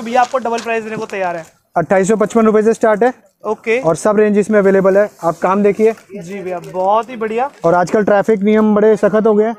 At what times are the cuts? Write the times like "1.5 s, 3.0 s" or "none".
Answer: none